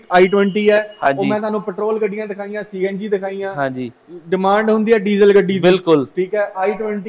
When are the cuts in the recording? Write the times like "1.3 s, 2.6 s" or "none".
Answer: none